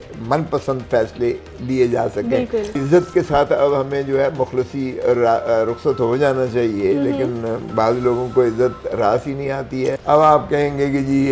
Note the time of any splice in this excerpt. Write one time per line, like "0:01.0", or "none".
0:02.8
0:10.0